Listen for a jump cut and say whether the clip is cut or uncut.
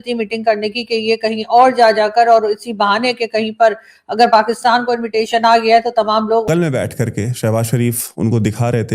cut